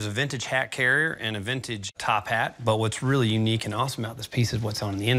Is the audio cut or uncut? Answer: uncut